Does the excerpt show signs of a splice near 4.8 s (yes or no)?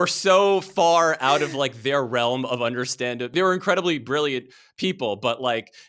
no